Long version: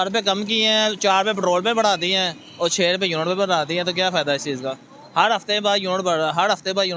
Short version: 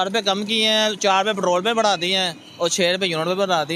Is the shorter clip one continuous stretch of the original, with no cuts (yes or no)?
yes